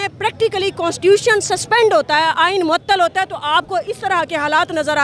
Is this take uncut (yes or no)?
yes